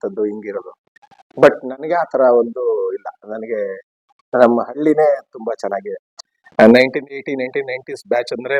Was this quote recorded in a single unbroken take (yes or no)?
no